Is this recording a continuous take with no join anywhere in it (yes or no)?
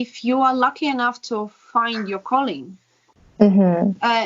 yes